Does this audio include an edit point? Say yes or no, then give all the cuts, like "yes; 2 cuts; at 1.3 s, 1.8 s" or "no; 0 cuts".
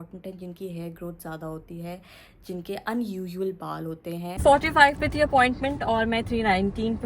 yes; 1 cut; at 4.4 s